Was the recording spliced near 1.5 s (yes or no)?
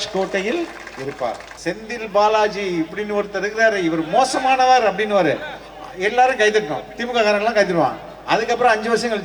yes